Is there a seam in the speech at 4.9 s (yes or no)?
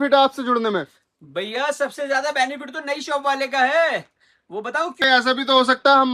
yes